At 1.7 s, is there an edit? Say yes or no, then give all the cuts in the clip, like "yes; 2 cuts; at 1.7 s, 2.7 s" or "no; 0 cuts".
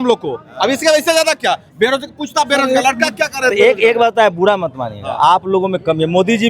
no; 0 cuts